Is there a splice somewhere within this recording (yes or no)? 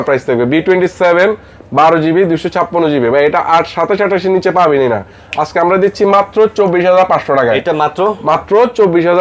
no